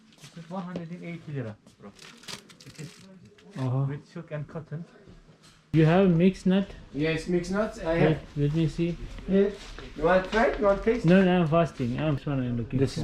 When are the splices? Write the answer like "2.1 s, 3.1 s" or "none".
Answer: 5.7 s, 12.1 s